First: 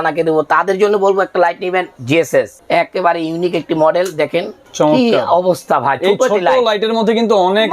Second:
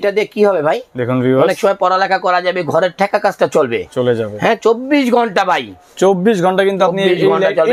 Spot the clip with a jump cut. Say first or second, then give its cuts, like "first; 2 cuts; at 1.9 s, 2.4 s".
first; 2 cuts; at 2.2 s, 4.6 s